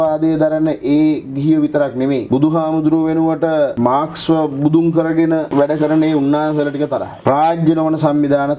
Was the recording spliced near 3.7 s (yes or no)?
yes